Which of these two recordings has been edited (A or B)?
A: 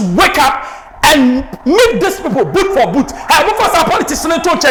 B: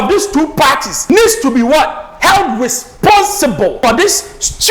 B